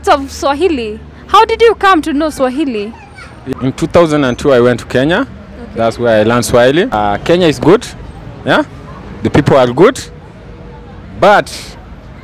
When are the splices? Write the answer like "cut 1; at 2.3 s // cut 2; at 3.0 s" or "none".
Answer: cut 1; at 3.4 s // cut 2; at 6.9 s